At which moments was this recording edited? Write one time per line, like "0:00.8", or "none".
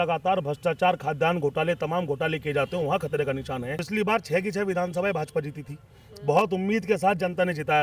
0:03.8

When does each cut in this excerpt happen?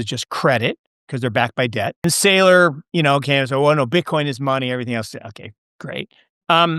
0:02.0

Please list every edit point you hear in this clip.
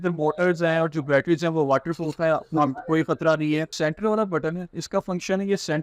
0:03.7

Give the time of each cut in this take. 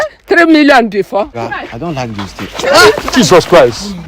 0:01.4

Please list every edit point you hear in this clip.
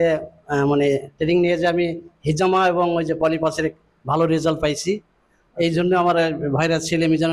none

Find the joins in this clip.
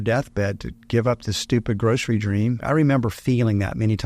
0:02.6

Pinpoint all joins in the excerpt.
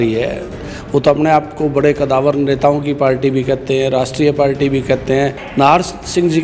0:05.4

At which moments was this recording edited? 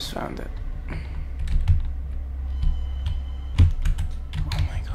0:03.4

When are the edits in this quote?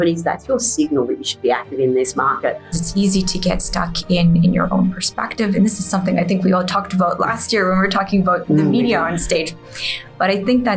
0:02.8

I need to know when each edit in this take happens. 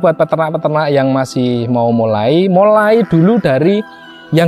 none

